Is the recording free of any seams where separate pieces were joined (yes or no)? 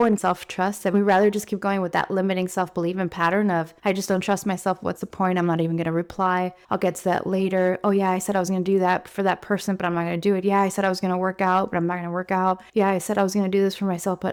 yes